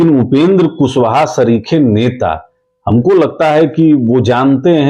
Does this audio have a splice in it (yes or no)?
no